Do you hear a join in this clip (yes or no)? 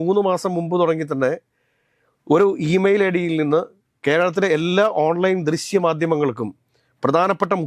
no